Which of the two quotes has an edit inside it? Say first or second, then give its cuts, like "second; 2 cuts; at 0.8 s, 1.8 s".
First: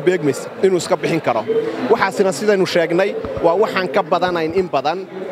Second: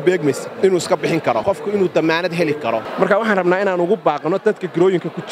second; 2 cuts; at 1.4 s, 2.9 s